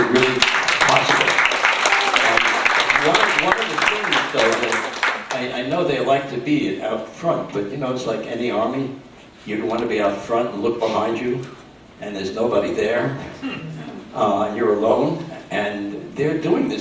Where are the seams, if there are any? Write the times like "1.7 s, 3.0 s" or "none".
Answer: 4.1 s